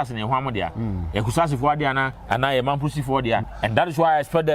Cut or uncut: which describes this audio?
cut